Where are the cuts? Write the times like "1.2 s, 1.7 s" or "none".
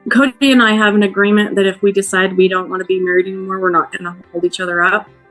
none